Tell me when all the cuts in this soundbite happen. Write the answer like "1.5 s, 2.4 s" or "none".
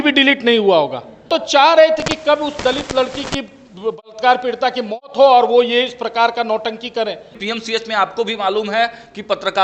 1.4 s, 7.3 s